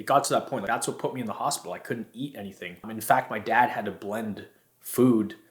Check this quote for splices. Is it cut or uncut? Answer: uncut